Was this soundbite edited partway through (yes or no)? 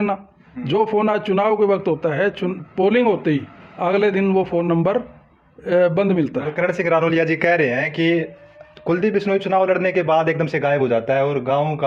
no